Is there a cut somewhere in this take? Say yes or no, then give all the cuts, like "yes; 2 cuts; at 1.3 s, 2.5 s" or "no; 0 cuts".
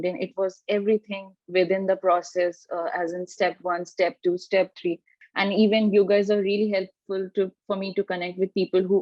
yes; 1 cut; at 5.1 s